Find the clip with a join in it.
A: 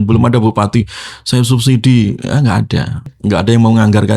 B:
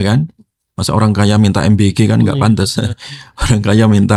A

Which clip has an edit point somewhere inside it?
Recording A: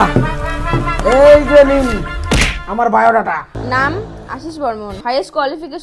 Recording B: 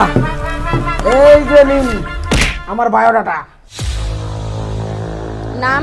A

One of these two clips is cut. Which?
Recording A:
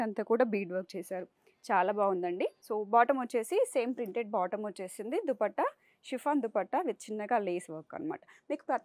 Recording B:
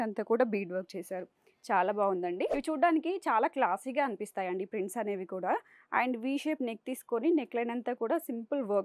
B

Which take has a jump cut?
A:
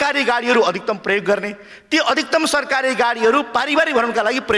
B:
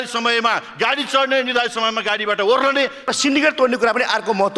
B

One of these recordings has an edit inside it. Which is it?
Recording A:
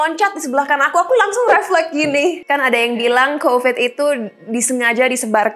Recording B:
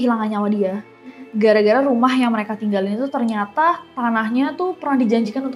A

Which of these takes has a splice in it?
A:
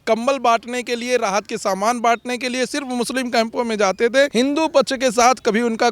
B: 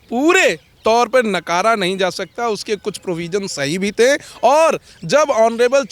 A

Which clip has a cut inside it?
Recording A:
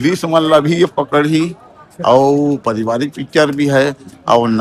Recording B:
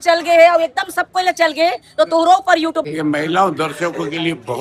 B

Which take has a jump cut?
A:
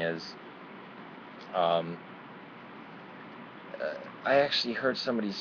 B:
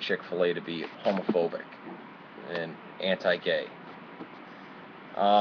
A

